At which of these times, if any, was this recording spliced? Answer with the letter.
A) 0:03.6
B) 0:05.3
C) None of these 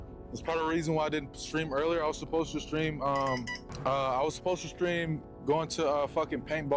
A